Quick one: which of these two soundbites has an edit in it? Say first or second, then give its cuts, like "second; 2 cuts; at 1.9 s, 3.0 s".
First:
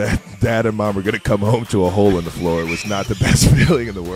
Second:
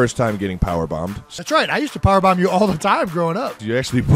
second; 1 cut; at 1.3 s